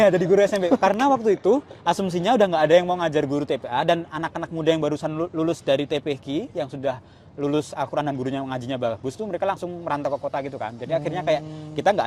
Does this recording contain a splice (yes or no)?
no